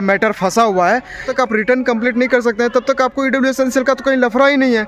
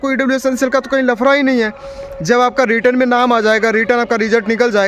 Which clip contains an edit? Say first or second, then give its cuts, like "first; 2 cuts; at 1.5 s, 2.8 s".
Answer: first; 1 cut; at 1.2 s